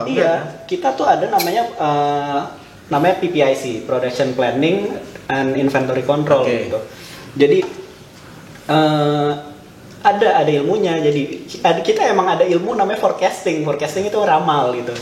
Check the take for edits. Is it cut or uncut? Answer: uncut